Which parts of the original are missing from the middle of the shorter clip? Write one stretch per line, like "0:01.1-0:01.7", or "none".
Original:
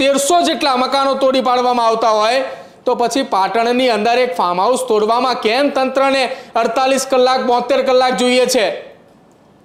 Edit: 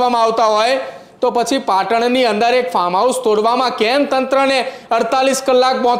none